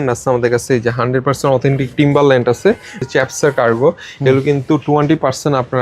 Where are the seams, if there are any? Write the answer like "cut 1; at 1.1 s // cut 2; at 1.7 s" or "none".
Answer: cut 1; at 3.0 s